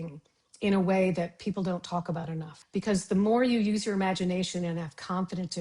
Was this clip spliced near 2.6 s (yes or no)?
yes